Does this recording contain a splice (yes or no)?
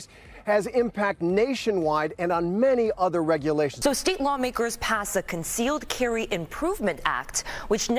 yes